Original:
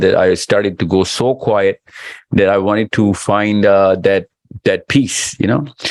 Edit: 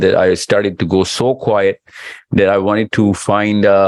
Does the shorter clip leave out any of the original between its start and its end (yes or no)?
no